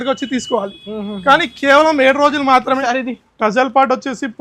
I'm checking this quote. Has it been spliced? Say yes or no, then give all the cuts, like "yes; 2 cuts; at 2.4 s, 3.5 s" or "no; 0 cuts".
yes; 1 cut; at 2.8 s